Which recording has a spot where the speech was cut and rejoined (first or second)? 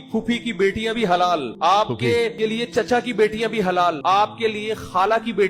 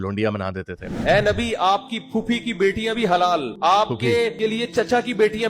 second